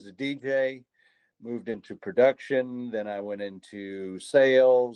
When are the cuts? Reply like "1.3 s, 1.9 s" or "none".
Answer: none